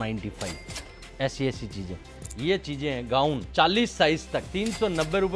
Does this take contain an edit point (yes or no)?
yes